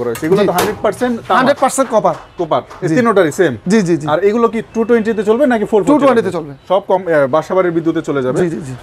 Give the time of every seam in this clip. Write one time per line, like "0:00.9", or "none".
none